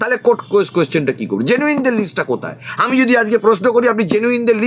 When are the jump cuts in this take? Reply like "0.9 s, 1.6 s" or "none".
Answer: none